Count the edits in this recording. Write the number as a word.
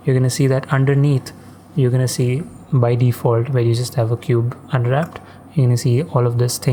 zero